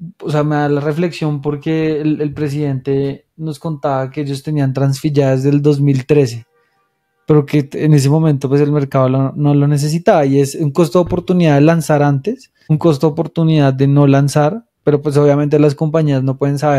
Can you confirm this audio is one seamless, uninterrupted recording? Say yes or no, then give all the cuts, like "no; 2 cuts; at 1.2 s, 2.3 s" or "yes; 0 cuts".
no; 1 cut; at 12.5 s